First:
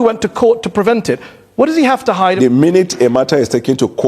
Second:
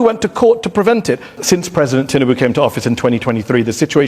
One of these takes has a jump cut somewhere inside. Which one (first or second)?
second